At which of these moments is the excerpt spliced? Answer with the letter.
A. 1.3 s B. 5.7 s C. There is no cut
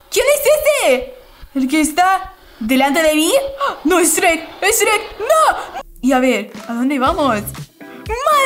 B